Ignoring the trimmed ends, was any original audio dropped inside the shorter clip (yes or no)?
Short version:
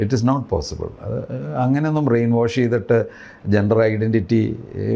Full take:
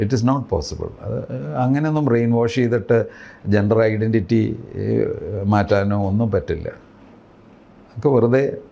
no